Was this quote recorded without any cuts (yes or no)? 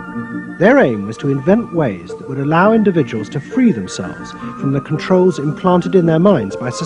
yes